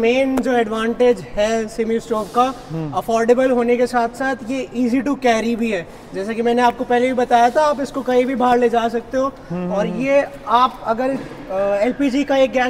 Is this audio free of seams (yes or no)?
yes